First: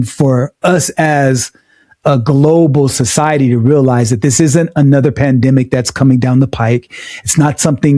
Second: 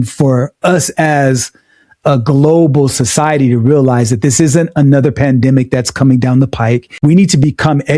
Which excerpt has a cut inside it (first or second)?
second